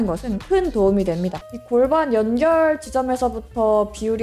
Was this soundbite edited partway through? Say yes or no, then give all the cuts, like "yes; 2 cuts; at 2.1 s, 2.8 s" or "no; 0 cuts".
yes; 1 cut; at 1.4 s